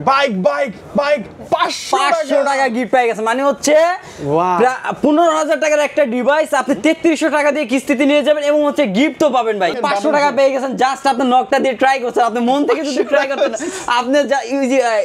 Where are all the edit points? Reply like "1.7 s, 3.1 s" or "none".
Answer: 9.8 s